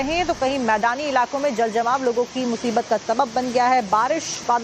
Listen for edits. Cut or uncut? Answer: cut